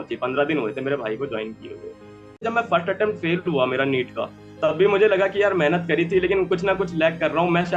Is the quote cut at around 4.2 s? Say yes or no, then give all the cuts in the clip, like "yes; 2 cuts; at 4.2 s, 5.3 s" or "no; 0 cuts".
no; 1 cut; at 2.4 s